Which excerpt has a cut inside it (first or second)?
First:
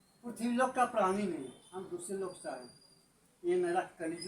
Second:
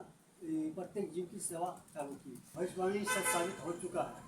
second